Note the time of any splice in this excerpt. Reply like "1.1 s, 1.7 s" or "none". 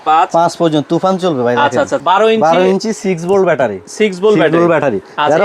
2.0 s